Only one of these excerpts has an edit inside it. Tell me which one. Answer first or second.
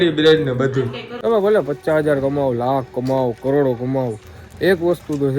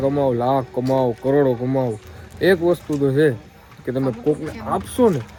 first